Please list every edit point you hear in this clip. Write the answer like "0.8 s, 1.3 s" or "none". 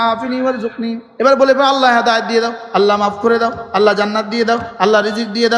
1.0 s